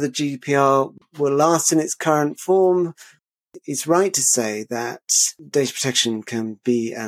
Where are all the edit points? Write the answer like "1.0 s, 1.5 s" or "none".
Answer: 0.9 s, 3.2 s